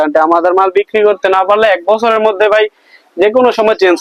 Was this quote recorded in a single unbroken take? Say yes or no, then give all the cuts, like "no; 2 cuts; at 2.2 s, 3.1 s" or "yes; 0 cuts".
yes; 0 cuts